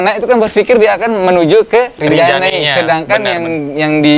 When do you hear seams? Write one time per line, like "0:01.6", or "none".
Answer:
none